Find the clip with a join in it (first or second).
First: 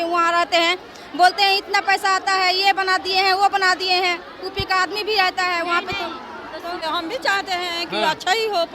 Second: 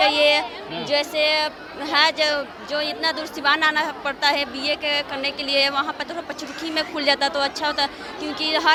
first